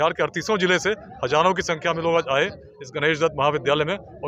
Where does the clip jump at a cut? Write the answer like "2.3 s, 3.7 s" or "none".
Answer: none